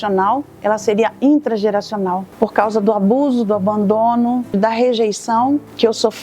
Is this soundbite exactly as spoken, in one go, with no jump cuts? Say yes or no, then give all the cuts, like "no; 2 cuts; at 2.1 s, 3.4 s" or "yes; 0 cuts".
no; 1 cut; at 4.6 s